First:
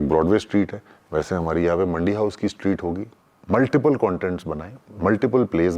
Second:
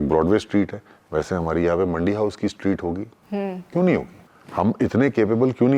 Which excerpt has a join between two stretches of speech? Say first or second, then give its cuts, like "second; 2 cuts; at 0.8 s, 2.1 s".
first; 1 cut; at 3.1 s